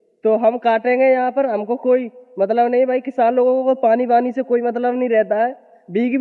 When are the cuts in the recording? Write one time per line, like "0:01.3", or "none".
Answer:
none